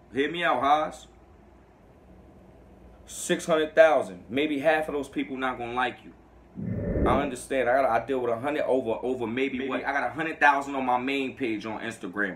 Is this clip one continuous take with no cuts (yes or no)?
no